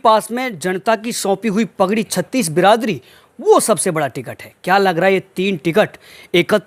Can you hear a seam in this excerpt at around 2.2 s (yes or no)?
no